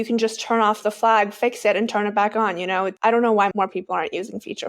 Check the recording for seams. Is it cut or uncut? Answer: cut